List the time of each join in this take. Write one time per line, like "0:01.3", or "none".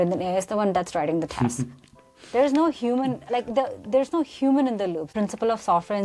0:05.1